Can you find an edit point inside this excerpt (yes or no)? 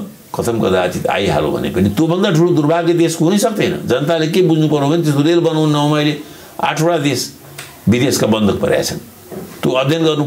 no